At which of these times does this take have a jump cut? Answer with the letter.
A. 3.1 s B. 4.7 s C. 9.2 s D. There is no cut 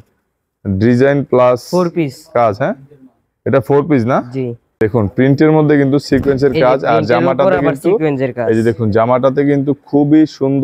B